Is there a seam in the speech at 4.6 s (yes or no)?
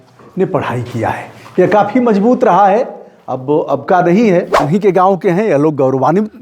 yes